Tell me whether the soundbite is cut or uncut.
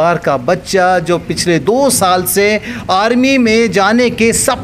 uncut